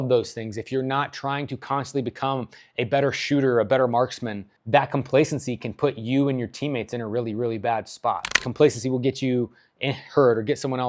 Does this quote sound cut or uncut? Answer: cut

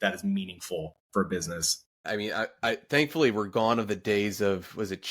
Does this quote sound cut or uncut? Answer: cut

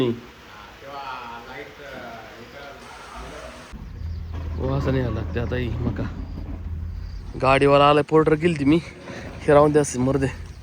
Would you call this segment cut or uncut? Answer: cut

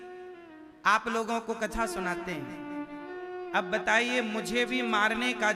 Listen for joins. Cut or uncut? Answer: cut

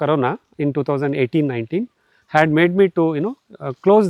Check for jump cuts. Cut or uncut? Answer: uncut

